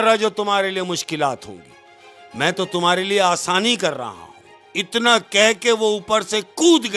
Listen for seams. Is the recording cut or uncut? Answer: uncut